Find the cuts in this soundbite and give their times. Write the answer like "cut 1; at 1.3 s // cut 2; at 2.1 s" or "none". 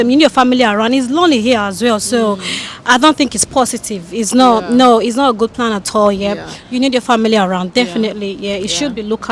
none